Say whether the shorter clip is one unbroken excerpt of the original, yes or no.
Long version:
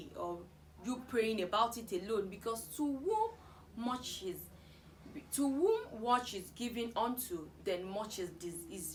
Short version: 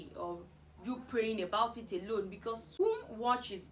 no